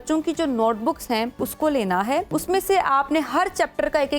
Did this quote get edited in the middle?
yes; 2 cuts; at 1.4 s, 2.3 s

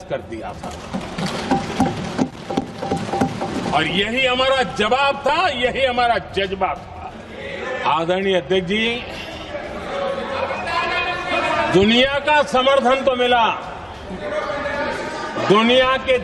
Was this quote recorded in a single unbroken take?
no; 1 cut; at 7.0 s

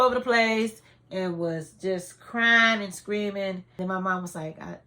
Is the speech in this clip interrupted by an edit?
yes; 1 cut; at 3.6 s

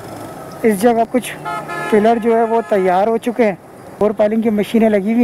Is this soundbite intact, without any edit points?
no; 2 cuts; at 1.1 s, 4.0 s

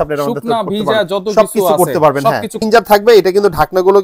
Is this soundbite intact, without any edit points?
no; 1 cut; at 2.6 s

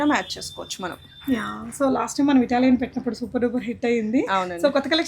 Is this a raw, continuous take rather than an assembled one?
yes; 0 cuts

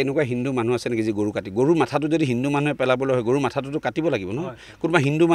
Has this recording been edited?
no; 0 cuts

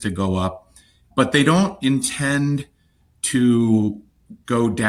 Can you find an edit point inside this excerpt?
no; 0 cuts

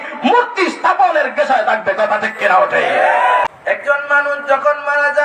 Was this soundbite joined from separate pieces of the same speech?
yes; 1 cut; at 3.4 s

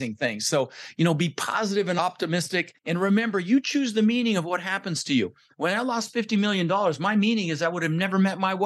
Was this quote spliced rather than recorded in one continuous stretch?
yes; 1 cut; at 2.3 s

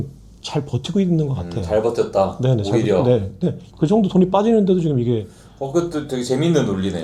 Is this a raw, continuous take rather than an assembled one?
yes; 0 cuts

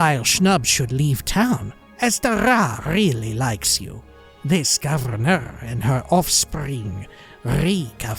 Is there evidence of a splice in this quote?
no; 0 cuts

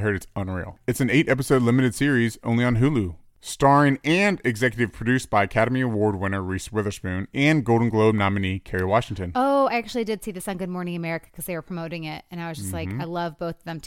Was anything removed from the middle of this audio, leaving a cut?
yes; 1 cut; at 3.2 s

